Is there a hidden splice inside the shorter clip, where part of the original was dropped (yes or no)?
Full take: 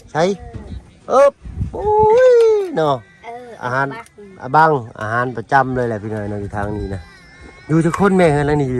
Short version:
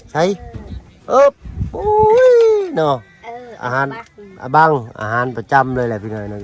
no